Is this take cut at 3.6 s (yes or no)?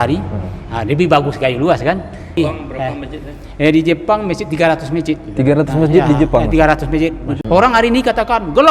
no